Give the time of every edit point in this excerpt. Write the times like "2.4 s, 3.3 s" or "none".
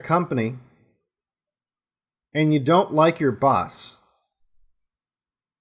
none